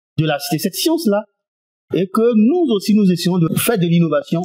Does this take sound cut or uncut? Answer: cut